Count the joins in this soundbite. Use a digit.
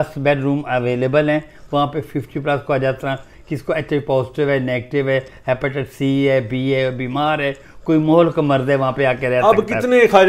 0